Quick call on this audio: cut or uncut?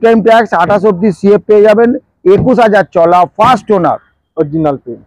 uncut